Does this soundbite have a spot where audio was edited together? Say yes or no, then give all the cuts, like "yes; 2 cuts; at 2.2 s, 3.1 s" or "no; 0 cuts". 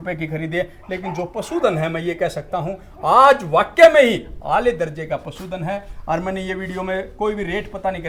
no; 0 cuts